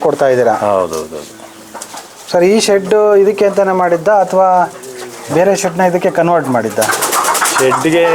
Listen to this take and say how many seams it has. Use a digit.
0